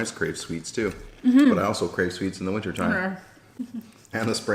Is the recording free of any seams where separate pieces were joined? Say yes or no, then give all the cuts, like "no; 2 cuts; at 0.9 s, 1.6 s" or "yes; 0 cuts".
yes; 0 cuts